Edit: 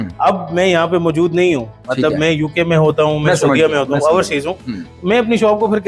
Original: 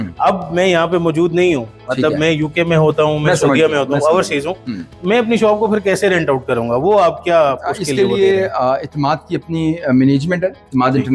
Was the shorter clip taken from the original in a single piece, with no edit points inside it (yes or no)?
yes